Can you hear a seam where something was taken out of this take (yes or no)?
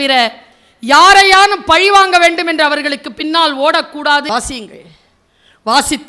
yes